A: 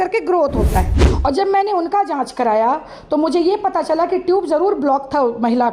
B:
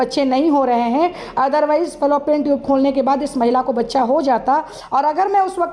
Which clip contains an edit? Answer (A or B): A